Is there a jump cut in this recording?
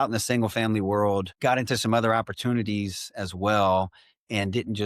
yes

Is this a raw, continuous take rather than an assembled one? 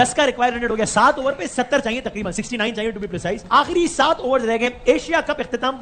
yes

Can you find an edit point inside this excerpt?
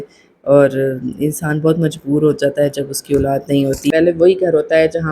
yes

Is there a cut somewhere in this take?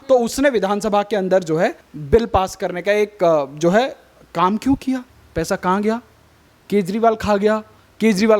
yes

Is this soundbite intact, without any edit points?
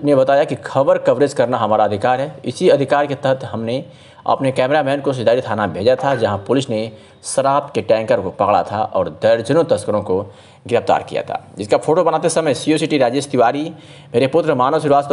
yes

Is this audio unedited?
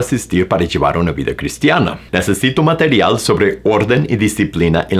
no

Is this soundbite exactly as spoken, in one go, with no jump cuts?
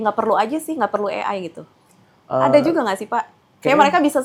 yes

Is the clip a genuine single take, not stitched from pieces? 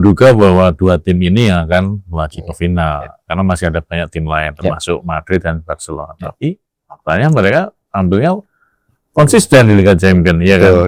yes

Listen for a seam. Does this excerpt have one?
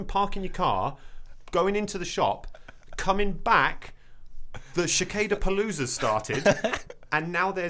no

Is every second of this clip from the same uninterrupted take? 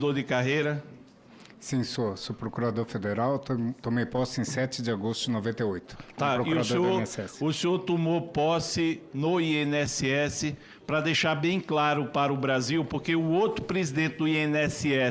yes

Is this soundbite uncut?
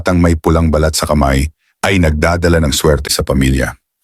no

